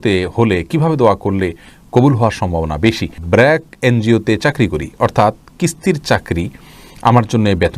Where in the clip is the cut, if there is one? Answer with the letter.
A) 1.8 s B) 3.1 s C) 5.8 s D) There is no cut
B